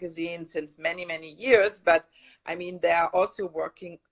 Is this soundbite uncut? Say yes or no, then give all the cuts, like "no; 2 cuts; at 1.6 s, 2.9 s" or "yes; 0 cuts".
yes; 0 cuts